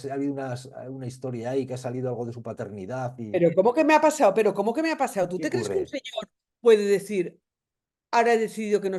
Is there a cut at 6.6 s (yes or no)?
no